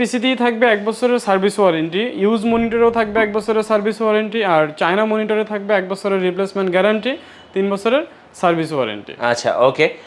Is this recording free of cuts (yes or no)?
yes